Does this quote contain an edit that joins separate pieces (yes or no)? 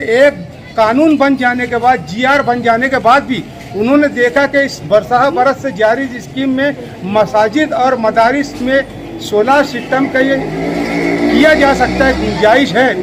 no